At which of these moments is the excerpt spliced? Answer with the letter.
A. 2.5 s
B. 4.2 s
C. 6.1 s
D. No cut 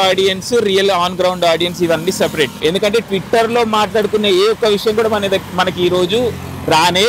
A